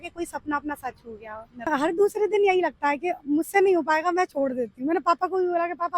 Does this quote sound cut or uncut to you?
cut